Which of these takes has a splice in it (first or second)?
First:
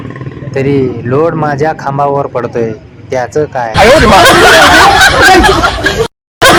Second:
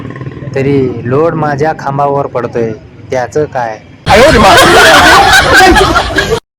second